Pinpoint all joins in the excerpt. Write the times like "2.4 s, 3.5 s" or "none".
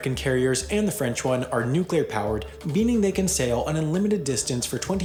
none